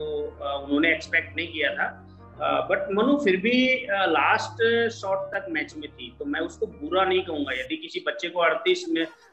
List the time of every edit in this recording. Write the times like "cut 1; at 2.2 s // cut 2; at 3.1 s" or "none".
none